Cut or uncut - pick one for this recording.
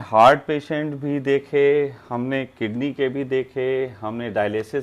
uncut